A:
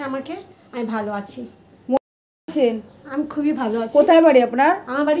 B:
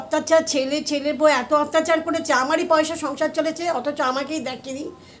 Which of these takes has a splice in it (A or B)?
A